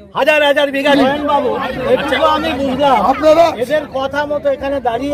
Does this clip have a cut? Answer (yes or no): yes